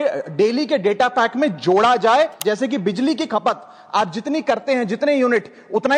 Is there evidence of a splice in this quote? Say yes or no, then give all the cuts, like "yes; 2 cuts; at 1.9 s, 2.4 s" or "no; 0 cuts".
yes; 1 cut; at 2.4 s